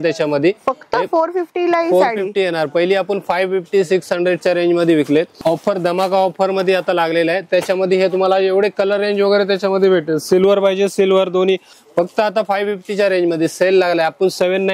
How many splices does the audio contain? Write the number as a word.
two